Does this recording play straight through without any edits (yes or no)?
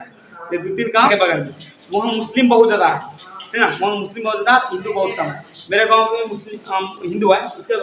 no